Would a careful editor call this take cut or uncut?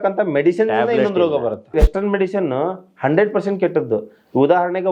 cut